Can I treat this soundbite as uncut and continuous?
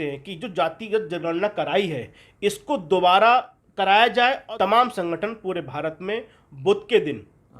no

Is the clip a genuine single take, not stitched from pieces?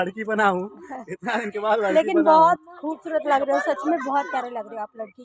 yes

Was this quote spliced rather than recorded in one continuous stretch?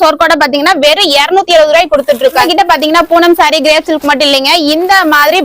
yes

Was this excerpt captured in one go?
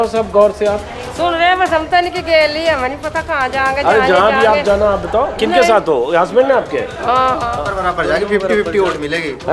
no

